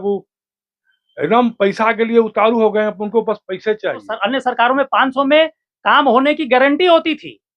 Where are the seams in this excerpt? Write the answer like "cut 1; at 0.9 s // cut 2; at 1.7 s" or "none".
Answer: cut 1; at 4.1 s

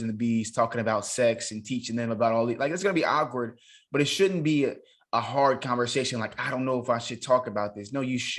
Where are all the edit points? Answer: none

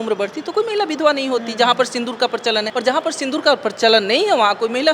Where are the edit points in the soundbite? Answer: cut 1; at 2.7 s

